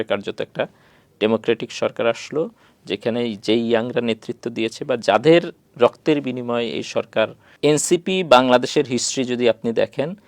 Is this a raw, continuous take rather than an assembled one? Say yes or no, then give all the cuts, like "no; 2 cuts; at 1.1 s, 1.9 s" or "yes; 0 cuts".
no; 1 cut; at 7.4 s